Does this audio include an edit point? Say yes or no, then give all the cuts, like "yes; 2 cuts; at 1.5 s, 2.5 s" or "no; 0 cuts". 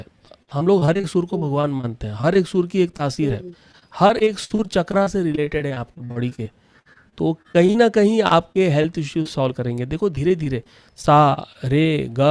no; 0 cuts